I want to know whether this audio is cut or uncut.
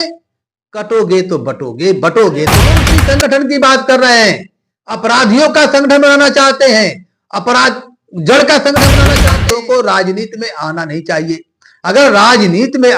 cut